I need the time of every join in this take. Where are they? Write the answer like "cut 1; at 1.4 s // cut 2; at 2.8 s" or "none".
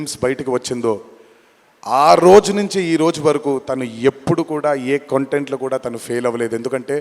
none